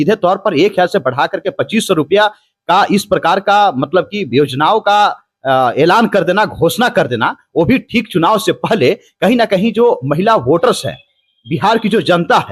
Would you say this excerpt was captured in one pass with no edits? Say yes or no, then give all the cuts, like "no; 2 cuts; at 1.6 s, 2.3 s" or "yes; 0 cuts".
yes; 0 cuts